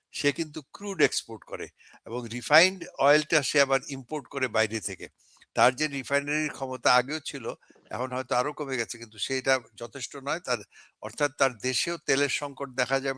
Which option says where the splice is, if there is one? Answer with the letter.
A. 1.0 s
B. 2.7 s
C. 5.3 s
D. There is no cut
D